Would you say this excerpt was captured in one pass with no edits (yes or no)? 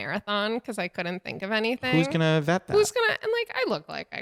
yes